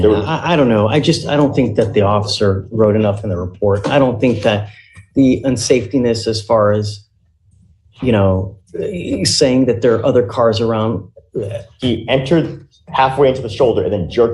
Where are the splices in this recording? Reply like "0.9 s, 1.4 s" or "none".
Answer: 11.6 s